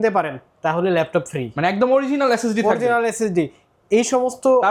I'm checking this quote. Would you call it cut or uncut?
uncut